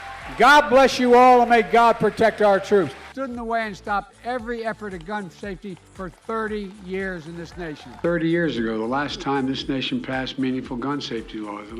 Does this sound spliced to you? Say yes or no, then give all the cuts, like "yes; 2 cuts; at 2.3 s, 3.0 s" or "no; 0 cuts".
yes; 2 cuts; at 3.1 s, 7.8 s